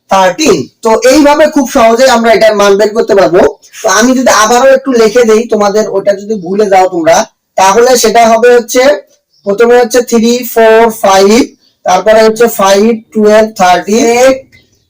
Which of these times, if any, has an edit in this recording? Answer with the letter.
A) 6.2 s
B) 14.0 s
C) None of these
B